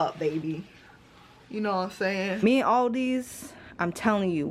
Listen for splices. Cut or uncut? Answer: cut